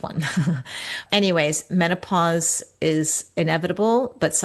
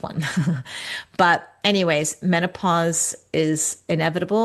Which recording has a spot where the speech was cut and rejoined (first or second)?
first